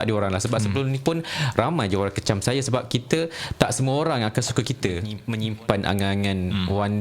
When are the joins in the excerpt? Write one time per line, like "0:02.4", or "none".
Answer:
0:05.2